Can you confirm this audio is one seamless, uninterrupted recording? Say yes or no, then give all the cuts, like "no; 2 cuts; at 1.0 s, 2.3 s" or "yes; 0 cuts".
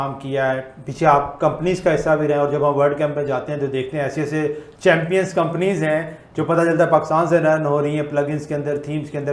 yes; 0 cuts